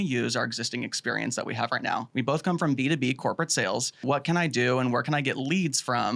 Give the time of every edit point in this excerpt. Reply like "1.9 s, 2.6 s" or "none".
2.1 s, 4.0 s